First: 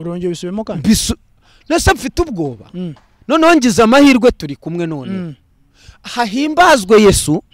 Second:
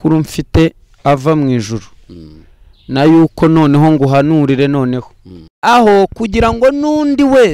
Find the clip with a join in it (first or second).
second